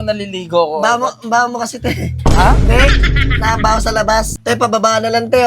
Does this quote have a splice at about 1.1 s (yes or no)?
no